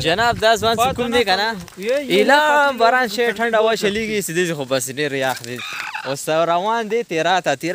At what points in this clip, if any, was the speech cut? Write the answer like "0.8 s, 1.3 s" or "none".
none